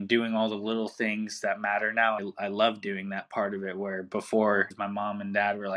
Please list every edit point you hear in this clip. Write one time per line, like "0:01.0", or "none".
0:02.2
0:04.7